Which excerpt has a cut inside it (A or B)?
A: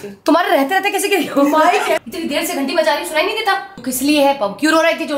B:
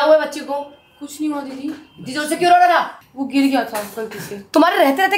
A